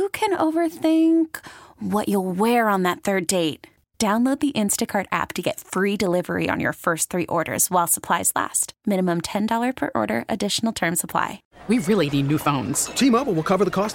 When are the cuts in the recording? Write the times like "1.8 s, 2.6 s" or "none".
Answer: 11.4 s